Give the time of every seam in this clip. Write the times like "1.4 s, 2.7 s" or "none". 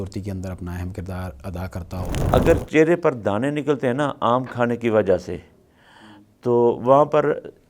2.2 s